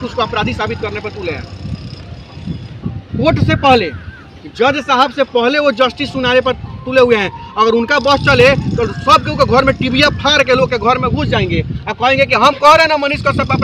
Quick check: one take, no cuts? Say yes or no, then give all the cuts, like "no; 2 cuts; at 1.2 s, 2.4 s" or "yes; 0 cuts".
yes; 0 cuts